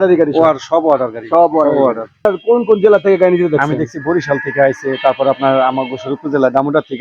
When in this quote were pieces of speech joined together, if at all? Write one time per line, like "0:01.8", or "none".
0:02.2